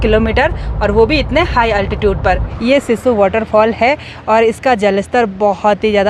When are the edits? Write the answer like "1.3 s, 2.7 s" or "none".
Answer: 2.5 s